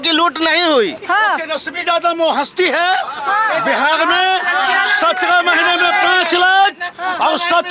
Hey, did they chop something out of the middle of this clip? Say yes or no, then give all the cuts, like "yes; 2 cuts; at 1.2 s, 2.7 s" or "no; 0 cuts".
yes; 1 cut; at 1.0 s